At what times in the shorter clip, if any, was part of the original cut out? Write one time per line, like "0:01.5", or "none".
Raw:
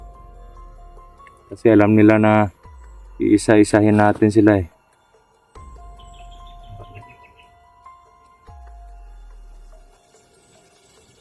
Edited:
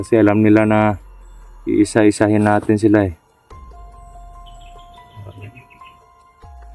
0:03.3